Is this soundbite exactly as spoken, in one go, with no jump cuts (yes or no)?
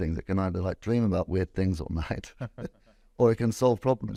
yes